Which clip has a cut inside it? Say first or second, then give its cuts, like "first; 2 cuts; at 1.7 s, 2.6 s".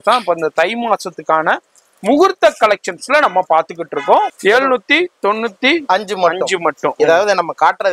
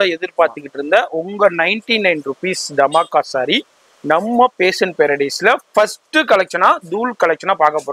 first; 1 cut; at 4.3 s